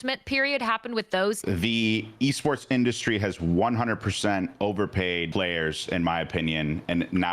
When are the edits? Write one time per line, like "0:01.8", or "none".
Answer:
0:01.4
0:05.3